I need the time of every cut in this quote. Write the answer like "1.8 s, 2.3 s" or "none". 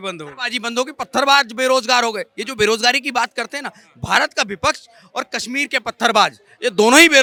none